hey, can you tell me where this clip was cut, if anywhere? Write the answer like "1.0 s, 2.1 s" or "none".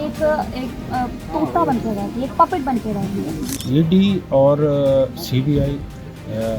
3.5 s